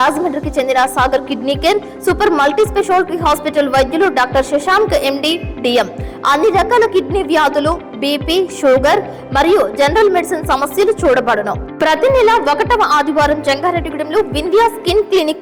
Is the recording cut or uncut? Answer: uncut